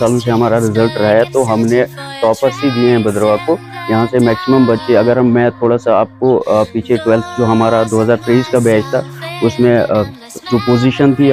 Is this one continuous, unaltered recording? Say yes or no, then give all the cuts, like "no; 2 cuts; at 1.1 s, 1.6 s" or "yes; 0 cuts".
yes; 0 cuts